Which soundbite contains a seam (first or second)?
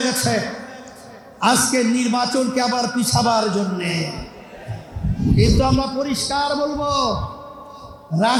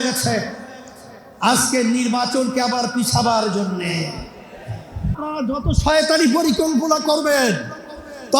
second